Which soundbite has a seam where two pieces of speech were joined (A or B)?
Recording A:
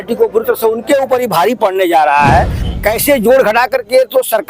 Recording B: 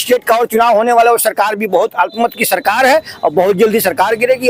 A